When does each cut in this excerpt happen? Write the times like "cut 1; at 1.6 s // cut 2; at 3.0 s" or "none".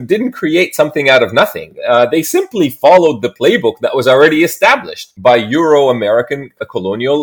none